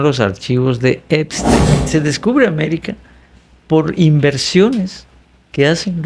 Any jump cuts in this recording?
yes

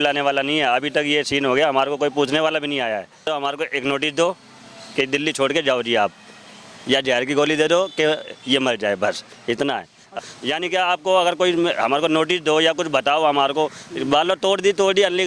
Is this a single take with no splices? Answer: no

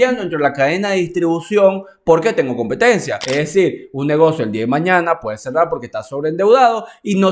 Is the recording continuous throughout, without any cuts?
no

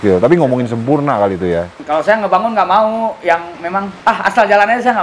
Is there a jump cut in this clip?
yes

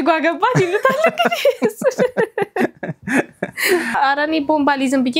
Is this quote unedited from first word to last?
no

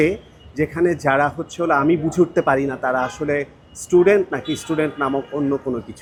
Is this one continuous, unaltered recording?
yes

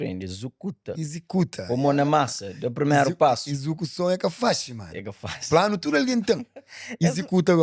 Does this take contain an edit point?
no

